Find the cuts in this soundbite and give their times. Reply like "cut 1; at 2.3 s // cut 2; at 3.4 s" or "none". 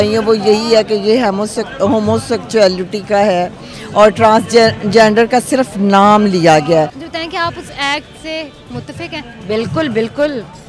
cut 1; at 7.0 s